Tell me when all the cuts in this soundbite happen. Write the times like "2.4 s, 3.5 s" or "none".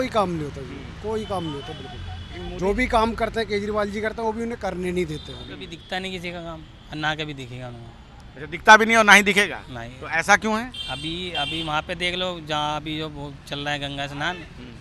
5.7 s